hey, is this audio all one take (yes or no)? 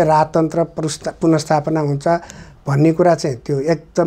yes